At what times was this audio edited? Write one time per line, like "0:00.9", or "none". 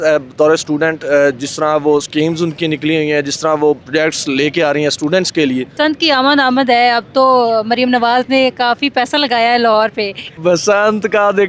0:03.8
0:05.7
0:10.3